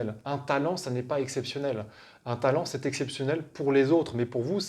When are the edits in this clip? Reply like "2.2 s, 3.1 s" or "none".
none